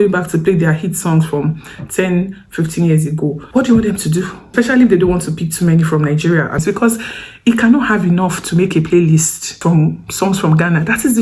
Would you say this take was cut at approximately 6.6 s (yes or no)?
yes